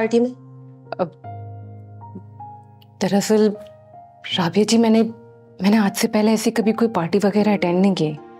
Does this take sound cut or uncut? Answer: uncut